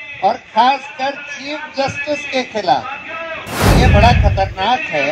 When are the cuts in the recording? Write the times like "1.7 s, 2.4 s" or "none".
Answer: 3.7 s